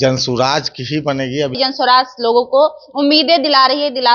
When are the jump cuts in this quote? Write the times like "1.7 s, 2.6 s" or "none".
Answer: 1.5 s